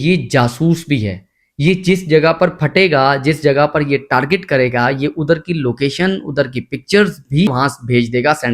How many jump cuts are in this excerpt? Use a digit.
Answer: 1